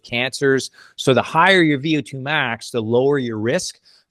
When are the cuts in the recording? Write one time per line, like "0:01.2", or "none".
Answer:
none